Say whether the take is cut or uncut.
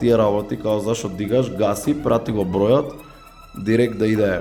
uncut